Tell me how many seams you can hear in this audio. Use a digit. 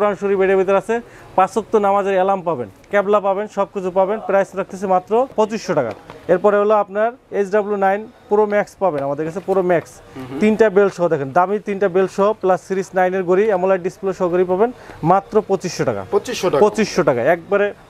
0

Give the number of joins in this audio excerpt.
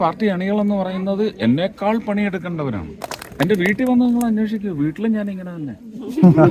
1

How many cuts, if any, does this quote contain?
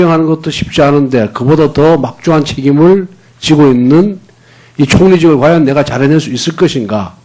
0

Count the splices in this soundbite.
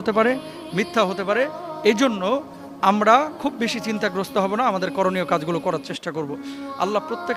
0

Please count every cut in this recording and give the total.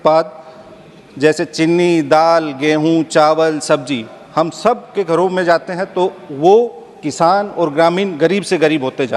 0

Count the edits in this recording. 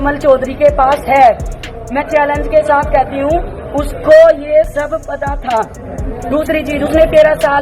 0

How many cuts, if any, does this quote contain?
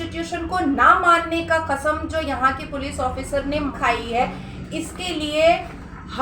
1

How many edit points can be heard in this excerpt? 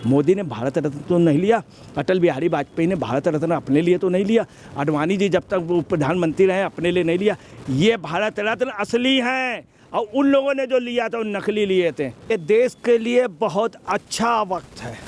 1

